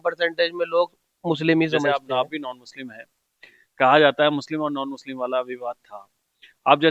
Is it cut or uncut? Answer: cut